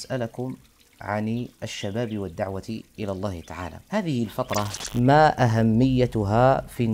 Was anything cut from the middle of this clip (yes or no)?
yes